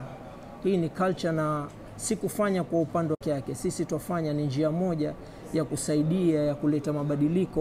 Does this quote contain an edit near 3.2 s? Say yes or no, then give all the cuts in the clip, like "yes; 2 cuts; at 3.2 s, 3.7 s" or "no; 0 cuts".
yes; 1 cut; at 3.2 s